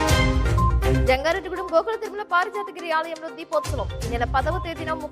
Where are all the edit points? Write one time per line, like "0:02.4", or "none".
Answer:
0:01.0